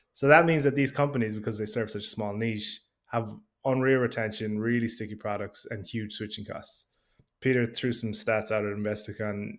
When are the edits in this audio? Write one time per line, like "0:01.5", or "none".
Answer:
none